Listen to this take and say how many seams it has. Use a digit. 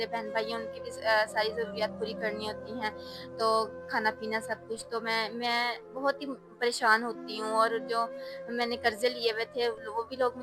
0